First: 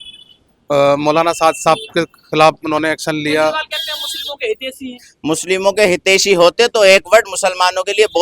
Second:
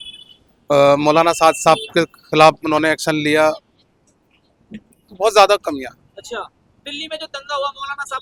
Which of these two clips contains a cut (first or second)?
first